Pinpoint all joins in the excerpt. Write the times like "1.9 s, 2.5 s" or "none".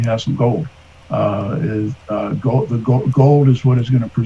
none